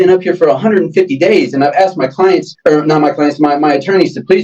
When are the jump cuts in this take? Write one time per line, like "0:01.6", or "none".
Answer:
0:02.5